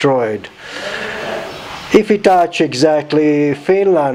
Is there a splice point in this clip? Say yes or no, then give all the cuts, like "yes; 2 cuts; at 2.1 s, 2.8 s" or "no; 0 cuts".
no; 0 cuts